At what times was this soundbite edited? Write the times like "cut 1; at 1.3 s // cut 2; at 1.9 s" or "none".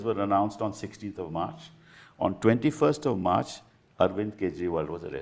none